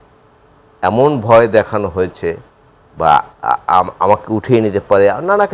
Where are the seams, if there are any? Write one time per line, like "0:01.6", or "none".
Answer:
none